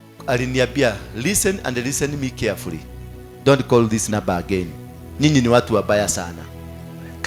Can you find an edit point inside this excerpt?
yes; 1 cut; at 4.1 s

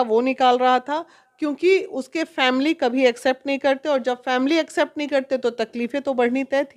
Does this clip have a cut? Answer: no; 0 cuts

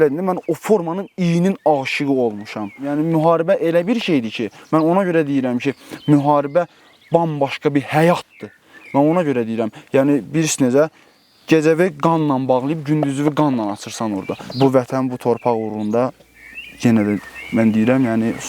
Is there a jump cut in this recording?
yes; 2 cuts; at 2.9 s, 14.4 s

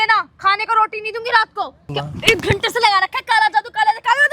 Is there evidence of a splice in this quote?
yes; 1 cut; at 2.0 s

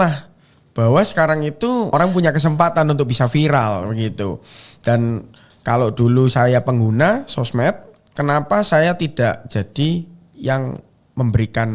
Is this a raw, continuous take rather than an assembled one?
no; 1 cut; at 1.9 s

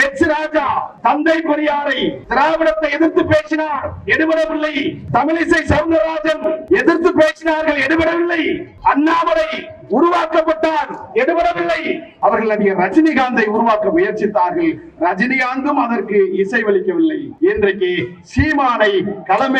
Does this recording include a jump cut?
yes; 7 cuts; at 0.9 s, 2.2 s, 5.0 s, 6.6 s, 8.7 s, 12.1 s, 17.3 s

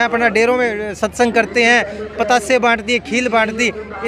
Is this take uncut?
yes; 0 cuts

